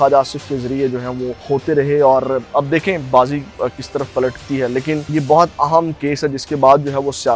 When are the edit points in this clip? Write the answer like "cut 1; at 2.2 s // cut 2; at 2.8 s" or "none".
cut 1; at 1.4 s // cut 2; at 5.1 s

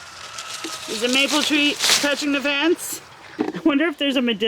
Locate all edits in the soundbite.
cut 1; at 3.2 s

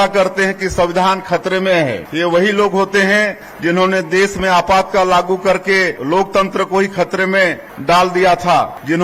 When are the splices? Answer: cut 1; at 6.0 s

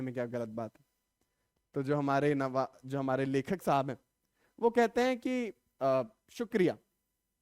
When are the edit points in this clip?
none

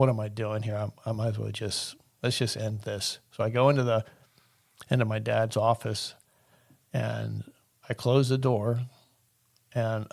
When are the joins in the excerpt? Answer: none

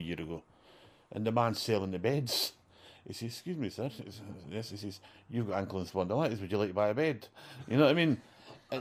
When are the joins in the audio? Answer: none

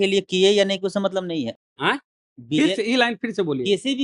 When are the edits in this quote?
cut 1; at 1.5 s

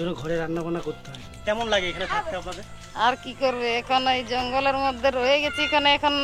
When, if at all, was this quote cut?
cut 1; at 1.4 s

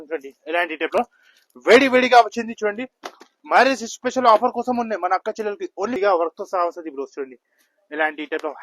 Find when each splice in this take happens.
cut 1; at 6.0 s

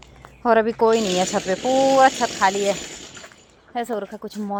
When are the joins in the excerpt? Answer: none

